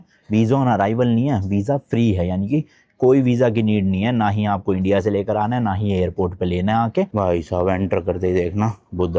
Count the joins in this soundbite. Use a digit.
1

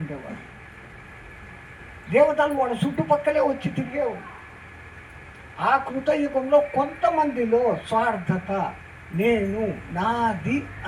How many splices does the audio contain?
0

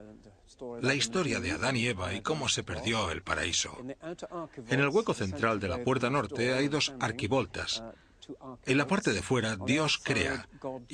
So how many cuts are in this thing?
0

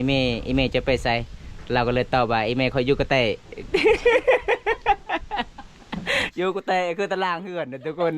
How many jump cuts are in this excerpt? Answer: 1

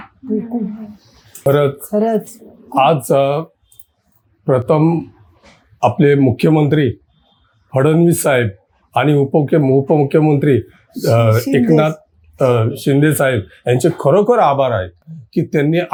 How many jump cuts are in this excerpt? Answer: 0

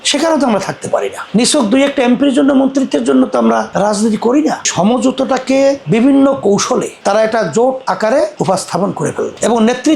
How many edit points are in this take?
2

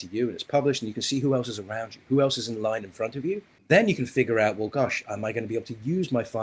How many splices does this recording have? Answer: 1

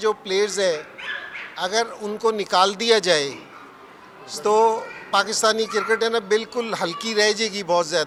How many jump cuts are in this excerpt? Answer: 0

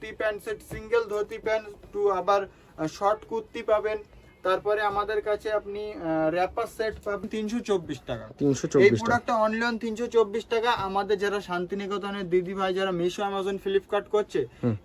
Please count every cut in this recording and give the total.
1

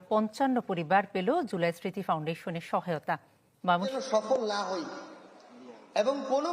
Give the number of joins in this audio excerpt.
1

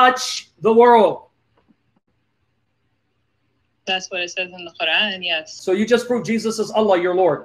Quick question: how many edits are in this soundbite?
1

